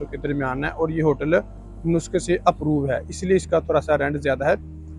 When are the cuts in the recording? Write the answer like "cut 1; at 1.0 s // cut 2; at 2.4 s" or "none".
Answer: none